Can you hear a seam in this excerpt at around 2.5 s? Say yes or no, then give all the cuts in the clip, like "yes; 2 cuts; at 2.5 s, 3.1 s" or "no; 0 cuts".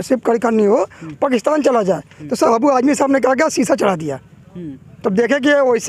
yes; 1 cut; at 2.5 s